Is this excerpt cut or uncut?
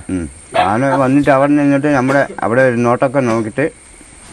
uncut